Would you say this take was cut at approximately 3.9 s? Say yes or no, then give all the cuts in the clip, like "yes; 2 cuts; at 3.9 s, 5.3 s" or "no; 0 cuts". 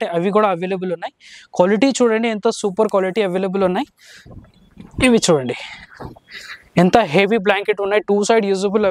no; 0 cuts